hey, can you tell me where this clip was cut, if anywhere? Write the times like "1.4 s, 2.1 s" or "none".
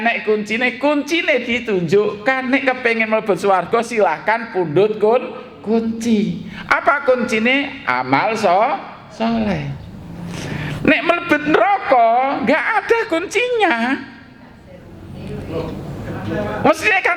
none